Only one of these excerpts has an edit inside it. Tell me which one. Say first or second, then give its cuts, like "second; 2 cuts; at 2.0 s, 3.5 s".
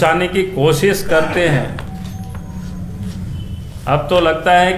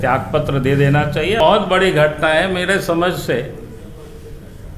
second; 1 cut; at 1.4 s